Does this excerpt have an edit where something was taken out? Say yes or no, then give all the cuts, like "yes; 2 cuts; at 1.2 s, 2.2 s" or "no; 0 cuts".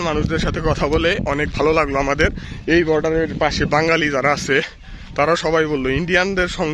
yes; 1 cut; at 2.5 s